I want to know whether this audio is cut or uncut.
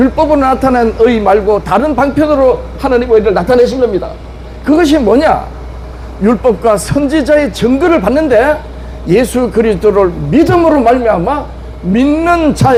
uncut